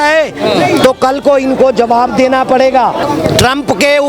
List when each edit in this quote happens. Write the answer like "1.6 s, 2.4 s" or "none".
3.1 s